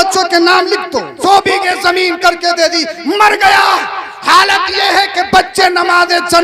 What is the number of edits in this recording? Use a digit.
1